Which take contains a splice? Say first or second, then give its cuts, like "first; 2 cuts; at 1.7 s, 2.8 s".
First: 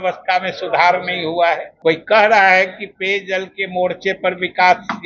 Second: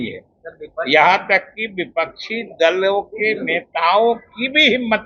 first; 1 cut; at 1.7 s